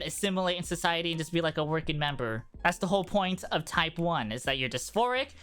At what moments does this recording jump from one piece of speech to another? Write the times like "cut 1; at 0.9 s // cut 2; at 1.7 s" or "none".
none

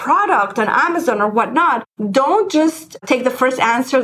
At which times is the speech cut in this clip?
cut 1; at 1.9 s

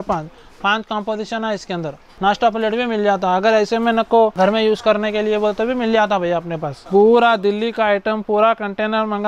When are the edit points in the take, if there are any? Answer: cut 1; at 2.0 s // cut 2; at 4.4 s // cut 3; at 6.7 s

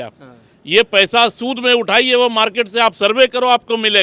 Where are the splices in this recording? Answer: none

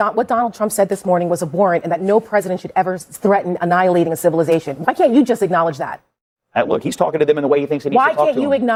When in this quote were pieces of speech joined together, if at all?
none

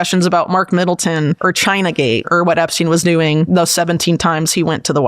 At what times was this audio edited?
cut 1; at 1.4 s // cut 2; at 2.3 s // cut 3; at 3.5 s

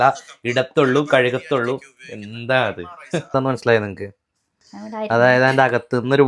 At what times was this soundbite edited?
cut 1; at 3.3 s

